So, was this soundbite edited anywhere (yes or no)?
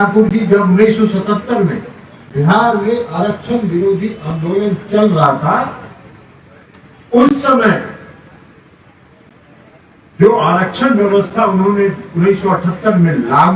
no